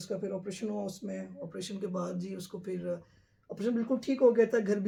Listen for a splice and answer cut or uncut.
uncut